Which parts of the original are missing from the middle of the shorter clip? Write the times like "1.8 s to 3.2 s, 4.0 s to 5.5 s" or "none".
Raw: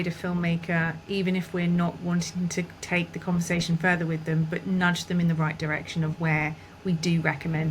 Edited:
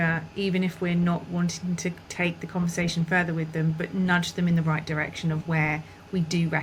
none